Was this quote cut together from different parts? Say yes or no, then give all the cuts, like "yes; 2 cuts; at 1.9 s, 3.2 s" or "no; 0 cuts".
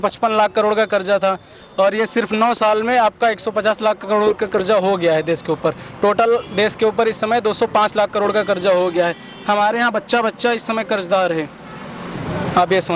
no; 0 cuts